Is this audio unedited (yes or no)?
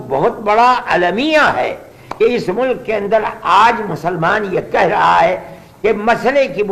yes